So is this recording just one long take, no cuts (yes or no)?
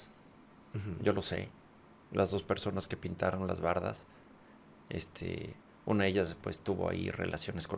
yes